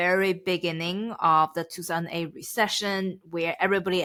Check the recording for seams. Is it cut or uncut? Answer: uncut